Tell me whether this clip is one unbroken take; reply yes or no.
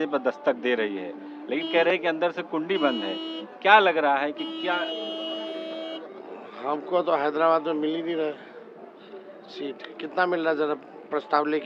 yes